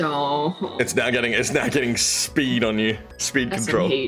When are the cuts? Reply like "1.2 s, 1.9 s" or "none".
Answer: 3.1 s